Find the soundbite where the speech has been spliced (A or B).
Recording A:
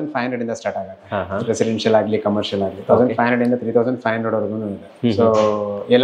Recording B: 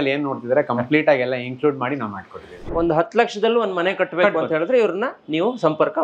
B